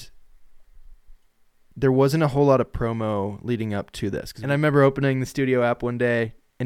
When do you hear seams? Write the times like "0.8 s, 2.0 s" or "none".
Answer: 4.3 s